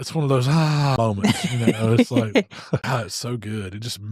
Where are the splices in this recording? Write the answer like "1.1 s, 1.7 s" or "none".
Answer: 0.9 s, 2.8 s